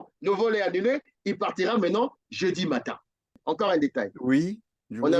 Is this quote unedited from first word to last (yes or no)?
no